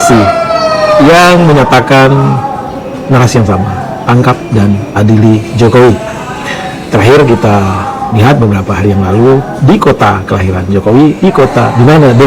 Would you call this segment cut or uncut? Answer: uncut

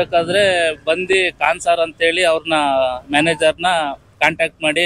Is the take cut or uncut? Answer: uncut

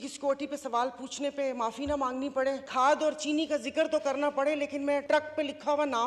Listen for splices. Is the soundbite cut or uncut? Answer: cut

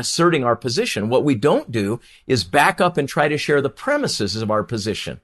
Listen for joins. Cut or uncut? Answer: uncut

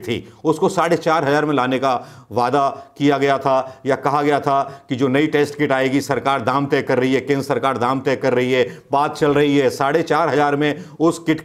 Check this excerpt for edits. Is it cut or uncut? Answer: uncut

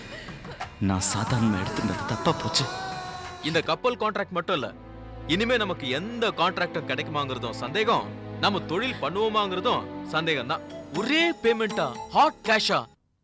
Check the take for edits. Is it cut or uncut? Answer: cut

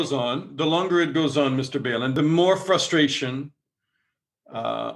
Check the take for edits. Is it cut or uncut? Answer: cut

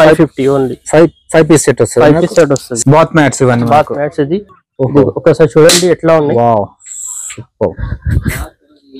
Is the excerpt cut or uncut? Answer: cut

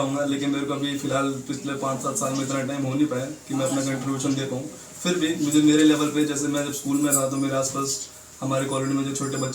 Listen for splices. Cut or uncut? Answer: uncut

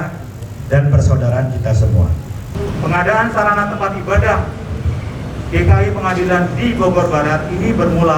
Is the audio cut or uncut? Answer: cut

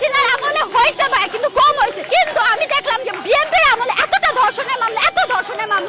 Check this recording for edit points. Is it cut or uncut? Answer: cut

